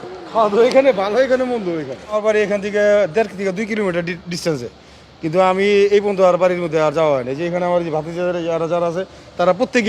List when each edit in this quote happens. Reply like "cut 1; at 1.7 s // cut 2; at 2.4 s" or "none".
cut 1; at 2.2 s